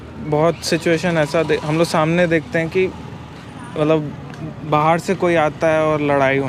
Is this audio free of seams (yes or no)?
yes